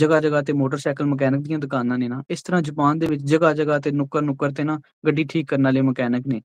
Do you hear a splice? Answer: no; 0 cuts

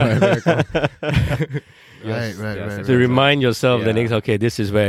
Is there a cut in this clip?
no; 0 cuts

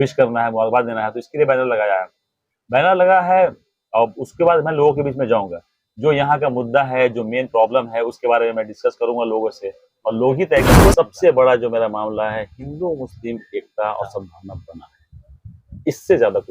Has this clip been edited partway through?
yes; 1 cut; at 10.8 s

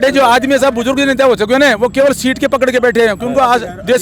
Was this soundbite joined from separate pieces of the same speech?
no; 0 cuts

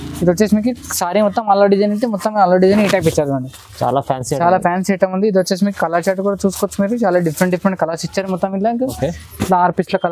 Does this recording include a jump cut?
no; 0 cuts

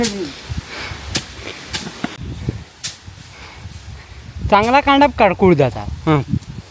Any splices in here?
yes; 1 cut; at 2.2 s

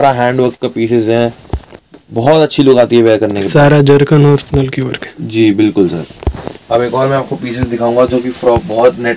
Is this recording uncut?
yes; 0 cuts

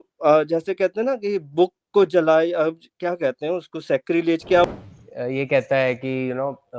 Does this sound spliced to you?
yes; 1 cut; at 4.7 s

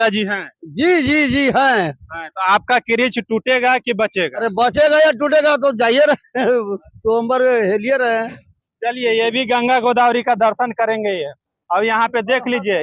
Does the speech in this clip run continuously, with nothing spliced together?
yes; 0 cuts

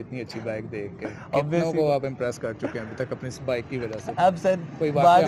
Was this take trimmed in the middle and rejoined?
no; 0 cuts

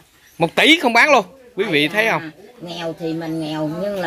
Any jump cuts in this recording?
no; 0 cuts

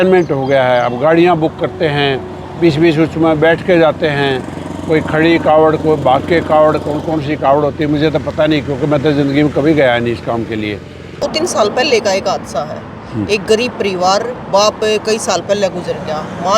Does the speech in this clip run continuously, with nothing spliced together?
no; 1 cut; at 11.2 s

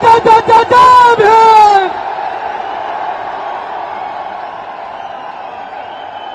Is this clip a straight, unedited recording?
yes; 0 cuts

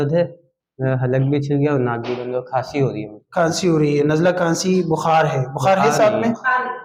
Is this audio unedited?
yes; 0 cuts

